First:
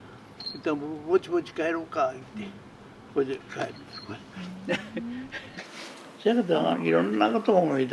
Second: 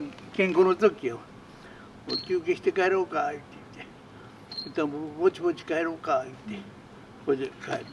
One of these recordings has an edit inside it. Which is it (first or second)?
first